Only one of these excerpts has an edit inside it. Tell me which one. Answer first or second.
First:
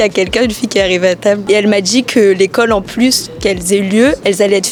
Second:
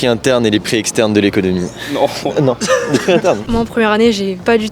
second